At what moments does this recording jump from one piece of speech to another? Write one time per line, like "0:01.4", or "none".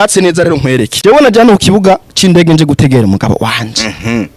0:00.9